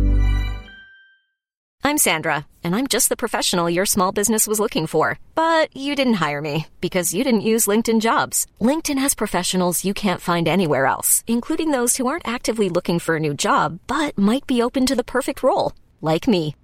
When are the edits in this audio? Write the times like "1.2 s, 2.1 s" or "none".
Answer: 1.7 s